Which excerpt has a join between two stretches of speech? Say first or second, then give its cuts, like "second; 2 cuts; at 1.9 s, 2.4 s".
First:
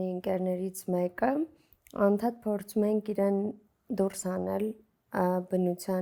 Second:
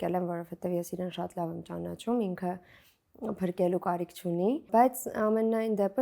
second; 1 cut; at 4.7 s